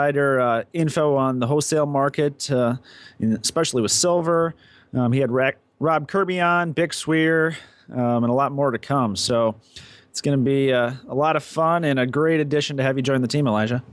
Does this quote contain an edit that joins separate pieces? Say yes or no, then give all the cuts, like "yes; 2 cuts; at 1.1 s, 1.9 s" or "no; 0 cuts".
no; 0 cuts